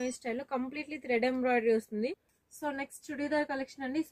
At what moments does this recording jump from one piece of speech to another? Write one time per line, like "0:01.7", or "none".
0:02.3